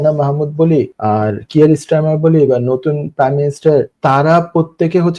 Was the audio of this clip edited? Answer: yes; 2 cuts; at 0.9 s, 3.9 s

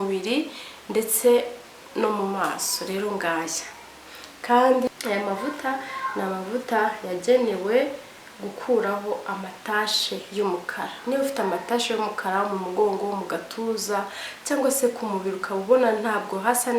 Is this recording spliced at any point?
yes; 1 cut; at 4.9 s

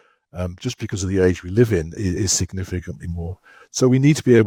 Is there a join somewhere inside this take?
no; 0 cuts

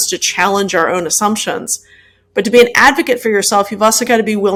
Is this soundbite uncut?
yes; 0 cuts

